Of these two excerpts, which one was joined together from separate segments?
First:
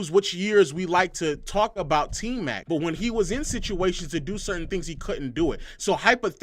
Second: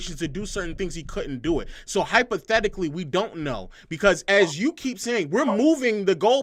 first; 1 cut; at 2.6 s

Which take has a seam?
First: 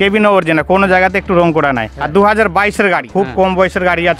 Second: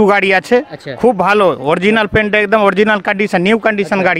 first; 2 cuts; at 1.9 s, 3.1 s

